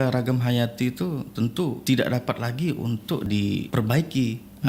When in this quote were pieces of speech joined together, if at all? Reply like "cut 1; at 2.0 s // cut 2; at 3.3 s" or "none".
cut 1; at 1.8 s // cut 2; at 3.2 s